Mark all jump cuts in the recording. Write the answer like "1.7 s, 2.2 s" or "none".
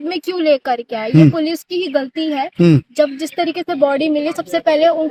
none